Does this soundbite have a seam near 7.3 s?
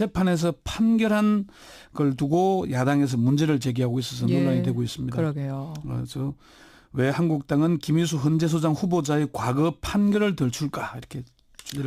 yes; 1 cut; at 7.3 s

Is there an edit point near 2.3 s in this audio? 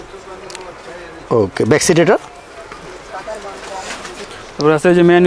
no; 1 cut; at 4.2 s

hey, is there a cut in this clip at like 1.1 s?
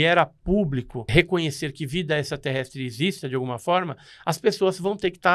yes; 1 cut; at 1.1 s

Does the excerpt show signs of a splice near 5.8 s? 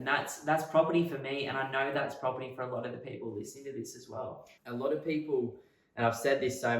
no; 1 cut; at 4.5 s

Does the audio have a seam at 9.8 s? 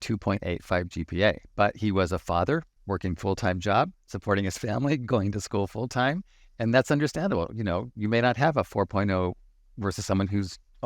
no; 1 cut; at 2.7 s

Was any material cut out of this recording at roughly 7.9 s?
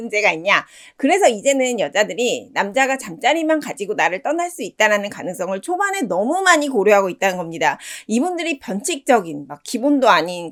no; 0 cuts

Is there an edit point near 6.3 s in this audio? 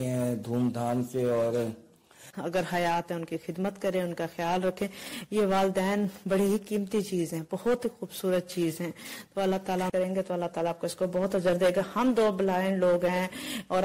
no; 2 cuts; at 2.3 s, 9.9 s

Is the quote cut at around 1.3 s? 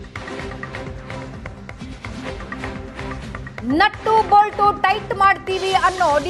yes; 1 cut; at 1.3 s

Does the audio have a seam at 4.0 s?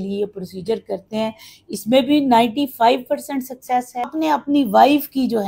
yes; 1 cut; at 4.0 s

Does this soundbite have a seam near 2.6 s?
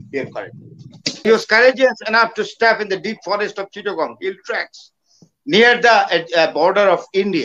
no; 1 cut; at 1.2 s

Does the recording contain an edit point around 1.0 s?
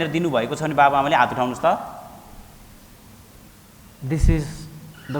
no; 1 cut; at 3.5 s

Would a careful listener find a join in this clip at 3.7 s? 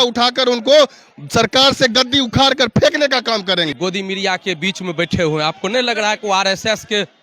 yes; 1 cut; at 3.7 s

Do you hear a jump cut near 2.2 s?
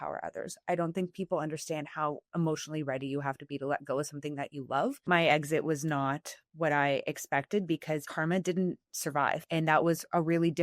no; 3 cuts; at 5.0 s, 8.1 s, 9.4 s

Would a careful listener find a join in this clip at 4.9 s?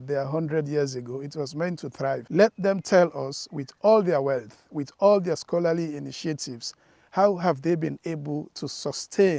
no; 1 cut; at 2.2 s

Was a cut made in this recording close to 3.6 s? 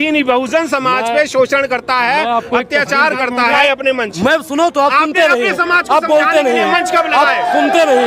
yes; 1 cut; at 3.6 s

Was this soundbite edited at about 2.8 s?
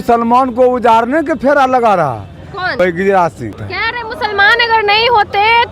yes; 2 cuts; at 2.8 s, 3.7 s

